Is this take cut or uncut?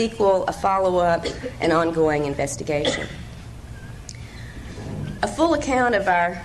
uncut